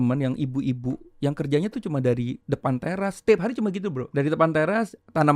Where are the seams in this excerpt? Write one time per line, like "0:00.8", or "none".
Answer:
0:04.0